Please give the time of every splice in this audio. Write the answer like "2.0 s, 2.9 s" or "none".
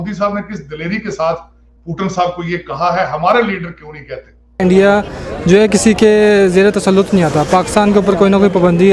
4.6 s